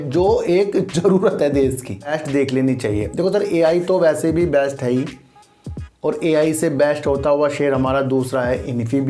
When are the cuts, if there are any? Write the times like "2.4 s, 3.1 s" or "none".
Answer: 2.1 s